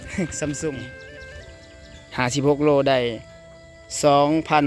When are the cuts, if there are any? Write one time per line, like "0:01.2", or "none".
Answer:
0:00.9